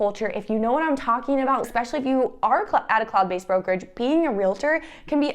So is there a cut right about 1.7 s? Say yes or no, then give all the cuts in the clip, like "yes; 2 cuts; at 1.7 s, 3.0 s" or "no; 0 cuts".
yes; 1 cut; at 1.7 s